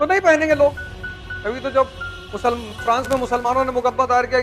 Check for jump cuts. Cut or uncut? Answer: cut